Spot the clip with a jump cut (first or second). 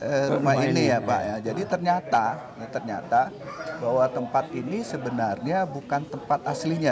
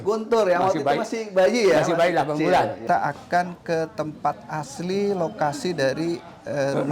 second